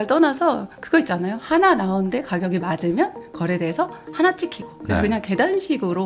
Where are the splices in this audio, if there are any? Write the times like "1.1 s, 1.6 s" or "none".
none

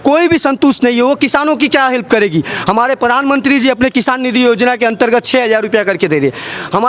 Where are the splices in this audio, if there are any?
none

